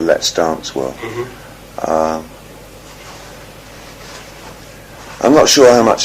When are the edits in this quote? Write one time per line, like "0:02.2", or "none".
0:02.8